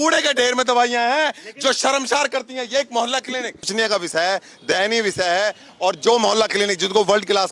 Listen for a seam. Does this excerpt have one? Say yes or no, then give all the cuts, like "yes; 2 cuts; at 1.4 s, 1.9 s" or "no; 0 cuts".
yes; 1 cut; at 3.7 s